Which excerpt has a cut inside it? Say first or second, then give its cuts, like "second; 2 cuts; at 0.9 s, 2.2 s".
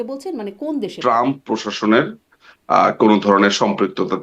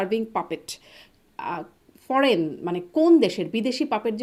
first; 1 cut; at 0.9 s